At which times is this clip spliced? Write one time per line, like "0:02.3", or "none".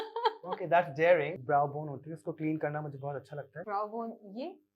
0:01.3
0:03.6